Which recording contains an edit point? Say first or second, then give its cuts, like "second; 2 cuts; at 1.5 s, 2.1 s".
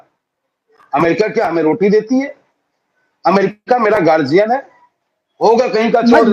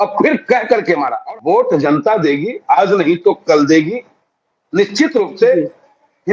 second; 1 cut; at 1.2 s